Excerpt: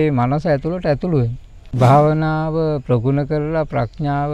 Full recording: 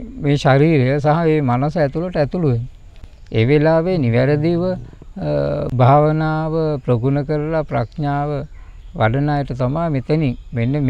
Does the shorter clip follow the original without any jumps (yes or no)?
no